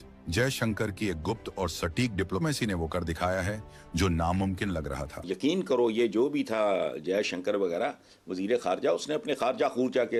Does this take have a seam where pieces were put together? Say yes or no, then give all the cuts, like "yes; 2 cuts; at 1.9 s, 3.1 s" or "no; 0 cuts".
no; 0 cuts